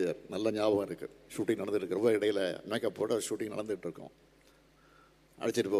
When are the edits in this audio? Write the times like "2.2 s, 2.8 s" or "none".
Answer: 1.4 s